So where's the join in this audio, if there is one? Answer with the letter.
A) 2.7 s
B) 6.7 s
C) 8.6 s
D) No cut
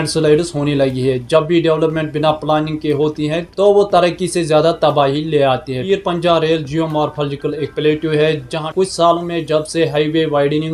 C